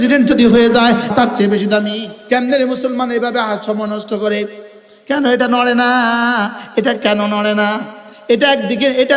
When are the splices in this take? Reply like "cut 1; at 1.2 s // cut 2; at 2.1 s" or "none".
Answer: cut 1; at 1.1 s // cut 2; at 2.1 s